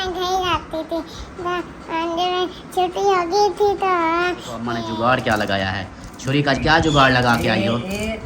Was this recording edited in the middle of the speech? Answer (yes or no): yes